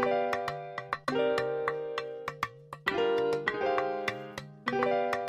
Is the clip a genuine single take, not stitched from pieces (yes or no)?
yes